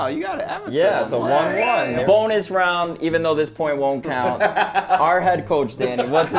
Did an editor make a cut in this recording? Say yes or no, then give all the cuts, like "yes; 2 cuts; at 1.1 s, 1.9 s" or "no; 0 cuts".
yes; 1 cut; at 2.0 s